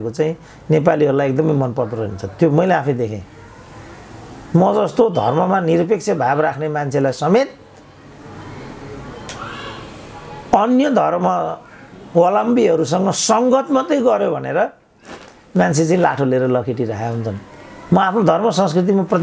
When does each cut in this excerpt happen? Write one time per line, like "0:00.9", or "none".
none